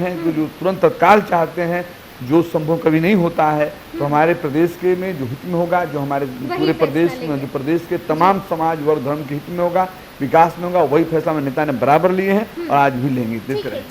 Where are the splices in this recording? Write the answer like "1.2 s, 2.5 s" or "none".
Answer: none